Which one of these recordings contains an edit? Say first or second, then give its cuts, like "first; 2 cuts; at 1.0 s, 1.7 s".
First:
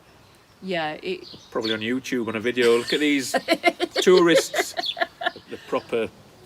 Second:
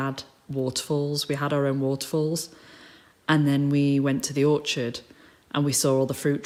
first; 1 cut; at 5.5 s